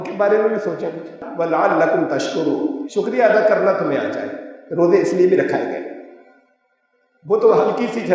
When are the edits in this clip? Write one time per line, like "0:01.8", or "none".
0:01.0